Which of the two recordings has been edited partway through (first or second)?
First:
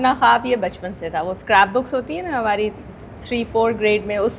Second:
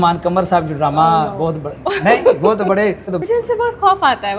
second